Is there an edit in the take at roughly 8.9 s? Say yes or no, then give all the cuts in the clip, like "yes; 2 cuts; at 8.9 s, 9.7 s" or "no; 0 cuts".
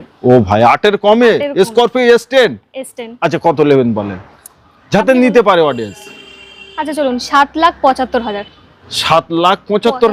no; 0 cuts